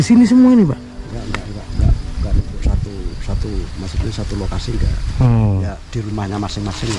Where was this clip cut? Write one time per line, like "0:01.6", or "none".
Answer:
none